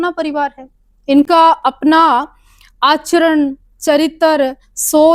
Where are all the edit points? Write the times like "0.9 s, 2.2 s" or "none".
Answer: none

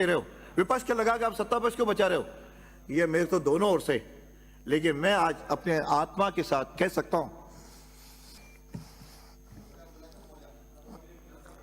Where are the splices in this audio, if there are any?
8.4 s

